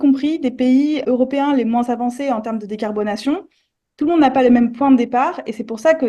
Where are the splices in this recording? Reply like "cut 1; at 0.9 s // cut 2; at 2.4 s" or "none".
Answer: cut 1; at 1.0 s